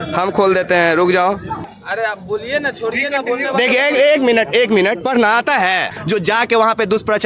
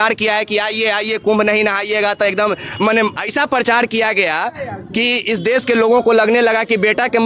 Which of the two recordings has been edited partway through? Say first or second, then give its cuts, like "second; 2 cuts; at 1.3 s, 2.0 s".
first; 1 cut; at 6.0 s